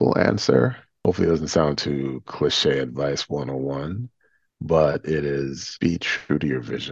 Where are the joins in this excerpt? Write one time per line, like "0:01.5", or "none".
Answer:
0:01.0
0:05.6